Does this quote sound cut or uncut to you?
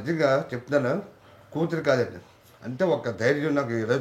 uncut